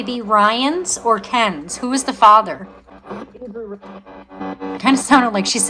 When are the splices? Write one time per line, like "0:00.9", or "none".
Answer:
0:02.9
0:04.4